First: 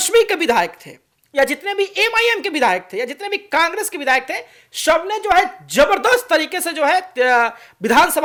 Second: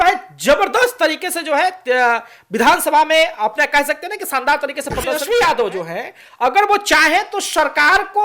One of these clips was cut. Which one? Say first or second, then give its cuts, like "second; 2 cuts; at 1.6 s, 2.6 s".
second; 1 cut; at 5.2 s